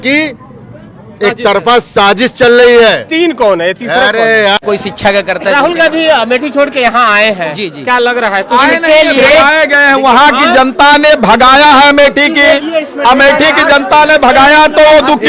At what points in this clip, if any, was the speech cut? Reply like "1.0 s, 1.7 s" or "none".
4.6 s